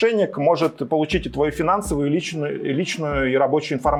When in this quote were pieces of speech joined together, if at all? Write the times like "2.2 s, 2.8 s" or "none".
none